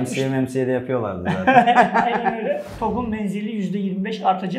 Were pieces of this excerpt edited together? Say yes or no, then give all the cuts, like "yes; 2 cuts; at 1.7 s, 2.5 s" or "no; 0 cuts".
yes; 1 cut; at 2.7 s